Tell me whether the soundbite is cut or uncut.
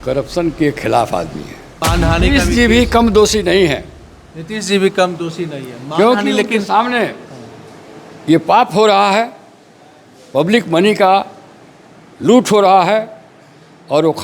cut